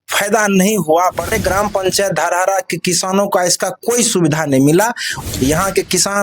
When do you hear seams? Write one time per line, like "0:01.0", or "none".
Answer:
0:01.3
0:05.1